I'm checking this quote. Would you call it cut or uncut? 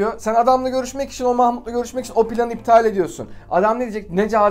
uncut